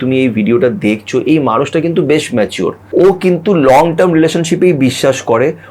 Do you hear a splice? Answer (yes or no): yes